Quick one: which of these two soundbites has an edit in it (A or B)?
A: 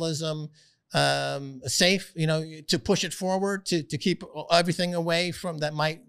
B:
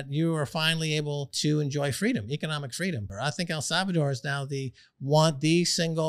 B